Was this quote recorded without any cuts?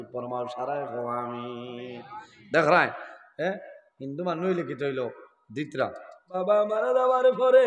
no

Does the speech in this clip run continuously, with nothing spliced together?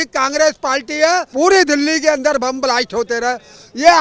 no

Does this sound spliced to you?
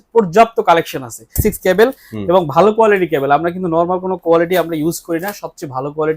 yes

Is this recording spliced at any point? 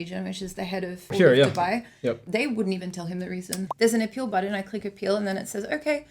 yes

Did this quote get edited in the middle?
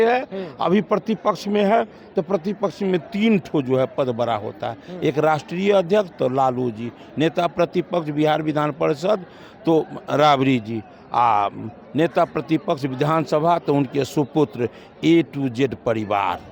no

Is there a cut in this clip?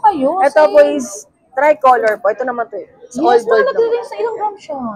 no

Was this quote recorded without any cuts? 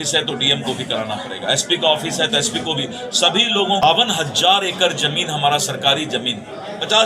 no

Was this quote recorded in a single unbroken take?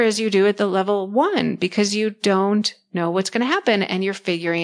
yes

